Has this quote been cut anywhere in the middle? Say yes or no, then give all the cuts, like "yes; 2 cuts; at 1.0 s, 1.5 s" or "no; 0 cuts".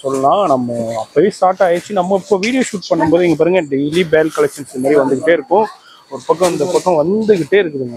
no; 0 cuts